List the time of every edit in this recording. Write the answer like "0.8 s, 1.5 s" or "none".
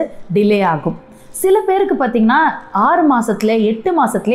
none